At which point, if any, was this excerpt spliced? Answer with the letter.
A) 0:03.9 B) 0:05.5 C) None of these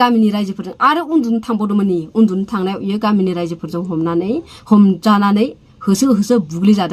C